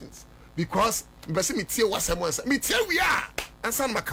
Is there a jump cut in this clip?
no; 0 cuts

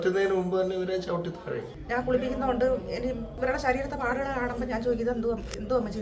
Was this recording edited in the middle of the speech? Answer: yes; 2 cuts; at 1.7 s, 3.3 s

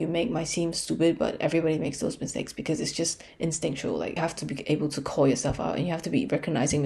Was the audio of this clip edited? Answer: yes; 1 cut; at 4.2 s

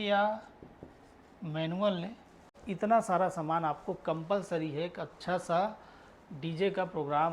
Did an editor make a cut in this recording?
yes; 1 cut; at 2.6 s

